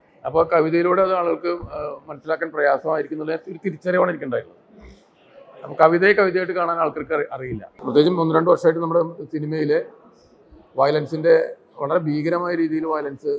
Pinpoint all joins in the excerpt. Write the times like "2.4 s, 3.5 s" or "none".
7.8 s